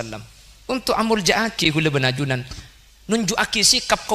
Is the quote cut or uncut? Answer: uncut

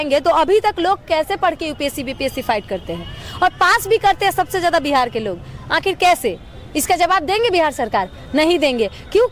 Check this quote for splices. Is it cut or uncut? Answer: uncut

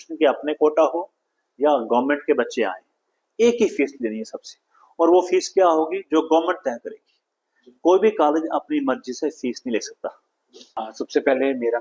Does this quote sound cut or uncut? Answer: uncut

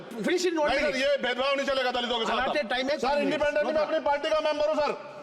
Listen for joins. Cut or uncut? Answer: cut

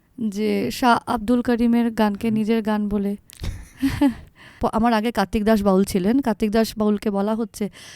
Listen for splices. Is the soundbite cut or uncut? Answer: cut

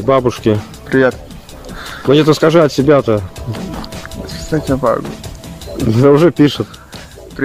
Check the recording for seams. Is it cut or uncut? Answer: uncut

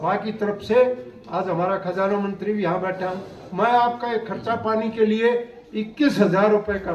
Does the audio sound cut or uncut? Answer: uncut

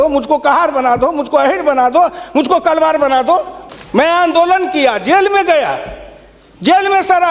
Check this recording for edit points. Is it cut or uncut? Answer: cut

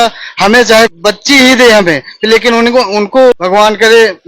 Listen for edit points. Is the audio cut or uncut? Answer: cut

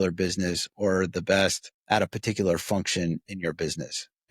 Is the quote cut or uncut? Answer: cut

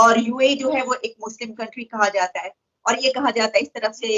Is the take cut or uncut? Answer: uncut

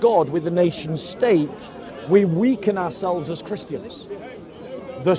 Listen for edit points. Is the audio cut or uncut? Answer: uncut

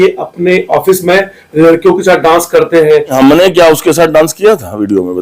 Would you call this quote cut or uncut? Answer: cut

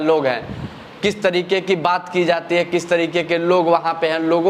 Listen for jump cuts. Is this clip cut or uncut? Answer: uncut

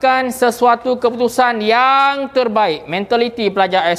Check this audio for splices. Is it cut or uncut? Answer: uncut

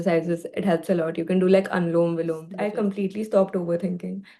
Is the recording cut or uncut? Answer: cut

